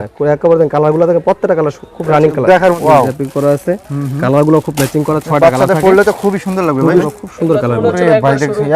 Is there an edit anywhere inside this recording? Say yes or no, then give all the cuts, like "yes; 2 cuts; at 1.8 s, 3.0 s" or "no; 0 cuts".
yes; 2 cuts; at 2.8 s, 7.1 s